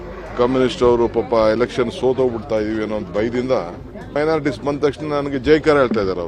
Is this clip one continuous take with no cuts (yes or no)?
no